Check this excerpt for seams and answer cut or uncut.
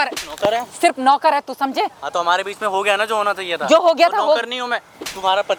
uncut